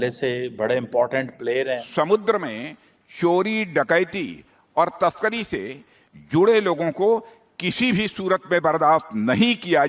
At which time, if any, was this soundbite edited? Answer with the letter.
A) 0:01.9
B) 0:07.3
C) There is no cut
A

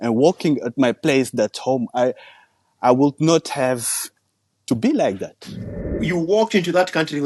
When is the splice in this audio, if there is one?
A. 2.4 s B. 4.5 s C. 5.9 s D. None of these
C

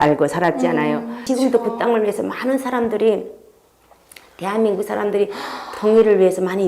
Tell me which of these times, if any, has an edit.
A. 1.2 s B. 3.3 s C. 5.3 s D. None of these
A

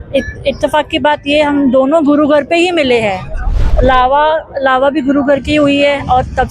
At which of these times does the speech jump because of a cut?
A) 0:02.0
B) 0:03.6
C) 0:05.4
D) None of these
B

